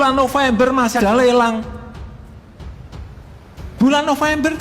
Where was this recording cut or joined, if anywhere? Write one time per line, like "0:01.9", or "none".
0:00.9